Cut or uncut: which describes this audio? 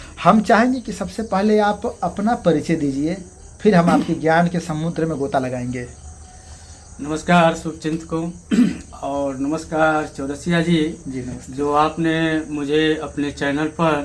uncut